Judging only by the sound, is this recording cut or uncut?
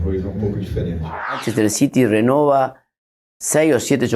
cut